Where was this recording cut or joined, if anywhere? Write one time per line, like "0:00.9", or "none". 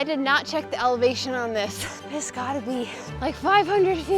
0:01.9
0:03.0